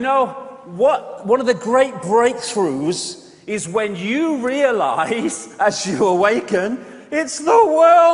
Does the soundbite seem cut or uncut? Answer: cut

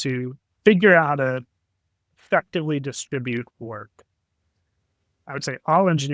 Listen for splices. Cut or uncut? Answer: cut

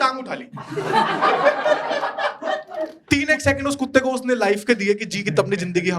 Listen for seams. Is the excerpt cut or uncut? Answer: cut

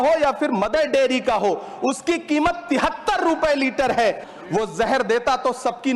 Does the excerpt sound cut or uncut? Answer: cut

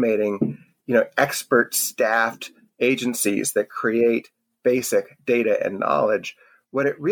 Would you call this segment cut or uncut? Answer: uncut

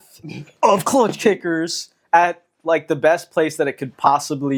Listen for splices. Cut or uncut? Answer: uncut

